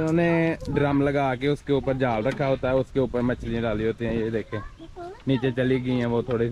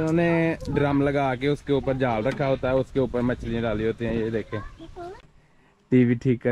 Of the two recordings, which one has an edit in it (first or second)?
second